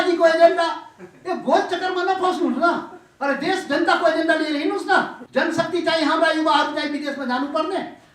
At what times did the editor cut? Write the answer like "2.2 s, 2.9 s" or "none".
5.2 s

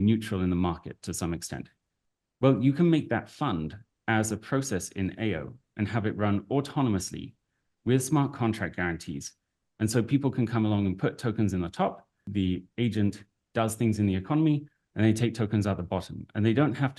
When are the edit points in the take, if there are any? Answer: 12.1 s

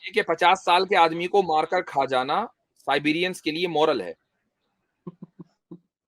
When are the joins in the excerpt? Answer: none

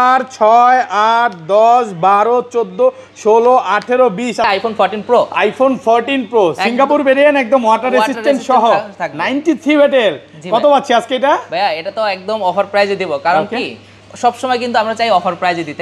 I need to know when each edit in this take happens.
4.4 s

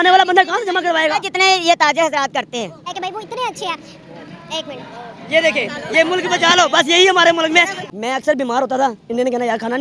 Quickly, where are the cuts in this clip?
2.9 s, 7.8 s

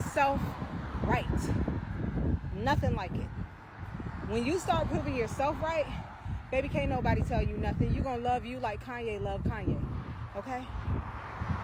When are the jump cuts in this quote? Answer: none

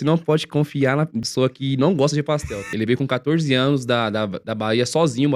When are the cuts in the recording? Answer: 1.2 s, 2.7 s

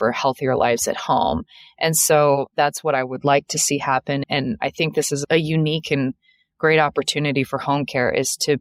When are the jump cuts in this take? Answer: none

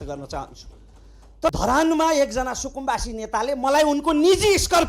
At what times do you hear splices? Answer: 1.5 s

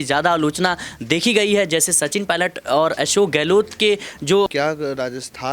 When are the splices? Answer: 4.5 s

